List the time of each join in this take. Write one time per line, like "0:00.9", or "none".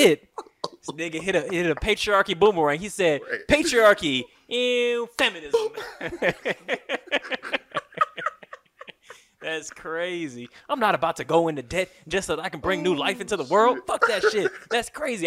none